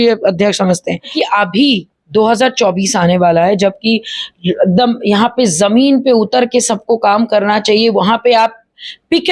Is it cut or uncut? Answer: cut